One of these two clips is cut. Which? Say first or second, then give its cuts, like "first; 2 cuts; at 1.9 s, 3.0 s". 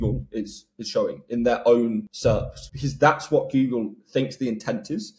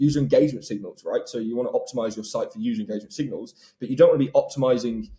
first; 1 cut; at 2.5 s